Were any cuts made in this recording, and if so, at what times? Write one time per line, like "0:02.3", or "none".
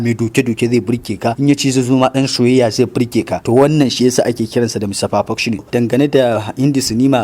0:01.4
0:03.4
0:05.7